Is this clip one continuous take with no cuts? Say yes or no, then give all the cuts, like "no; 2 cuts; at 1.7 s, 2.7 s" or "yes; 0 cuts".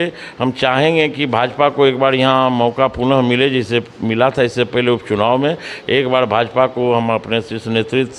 yes; 0 cuts